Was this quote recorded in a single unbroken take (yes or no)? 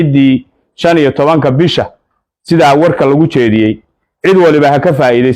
yes